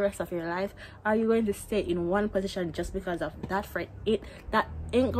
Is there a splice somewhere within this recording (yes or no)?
no